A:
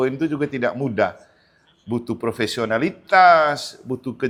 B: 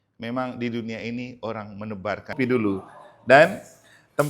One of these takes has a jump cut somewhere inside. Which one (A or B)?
B